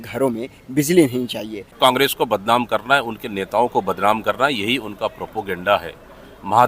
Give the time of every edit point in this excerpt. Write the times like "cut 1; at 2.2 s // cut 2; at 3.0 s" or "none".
cut 1; at 1.7 s